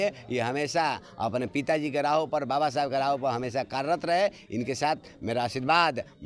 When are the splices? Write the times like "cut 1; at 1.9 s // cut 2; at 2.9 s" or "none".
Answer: none